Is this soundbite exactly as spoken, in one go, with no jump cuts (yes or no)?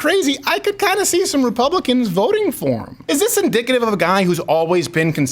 no